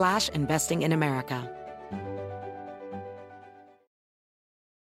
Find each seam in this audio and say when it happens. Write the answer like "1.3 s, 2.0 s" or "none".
1.4 s